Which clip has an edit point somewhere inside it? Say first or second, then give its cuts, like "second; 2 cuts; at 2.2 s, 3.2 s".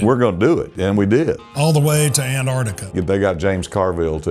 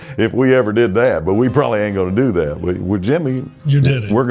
first; 2 cuts; at 1.5 s, 2.9 s